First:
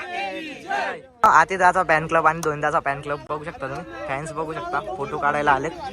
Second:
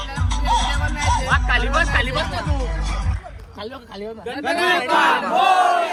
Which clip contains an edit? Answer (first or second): first